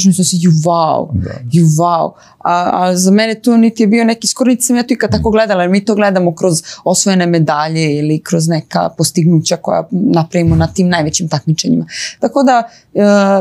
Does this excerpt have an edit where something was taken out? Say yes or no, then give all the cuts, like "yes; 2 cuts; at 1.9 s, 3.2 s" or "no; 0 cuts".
no; 0 cuts